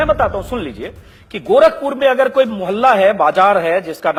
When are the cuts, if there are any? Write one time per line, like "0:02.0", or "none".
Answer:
none